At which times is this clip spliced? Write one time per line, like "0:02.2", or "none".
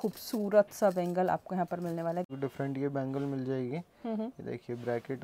0:02.3